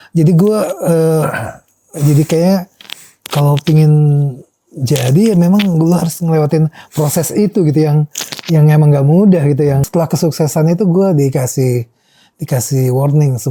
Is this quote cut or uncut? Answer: cut